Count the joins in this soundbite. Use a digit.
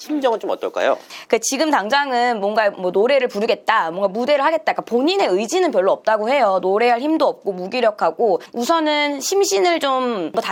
0